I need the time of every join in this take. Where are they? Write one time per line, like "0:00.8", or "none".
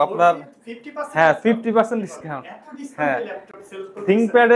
none

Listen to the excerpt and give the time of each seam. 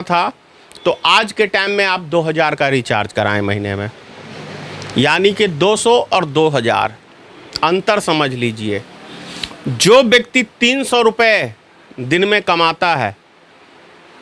none

